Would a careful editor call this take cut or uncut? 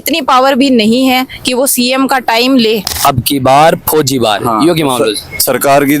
cut